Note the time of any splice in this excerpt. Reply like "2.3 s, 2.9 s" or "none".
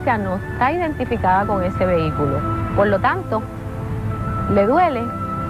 none